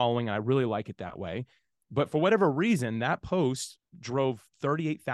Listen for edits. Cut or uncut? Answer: uncut